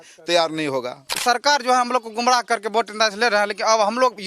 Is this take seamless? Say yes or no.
no